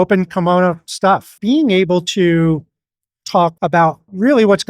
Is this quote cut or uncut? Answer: cut